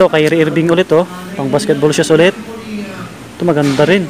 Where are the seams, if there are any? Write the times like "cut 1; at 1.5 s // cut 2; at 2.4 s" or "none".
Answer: none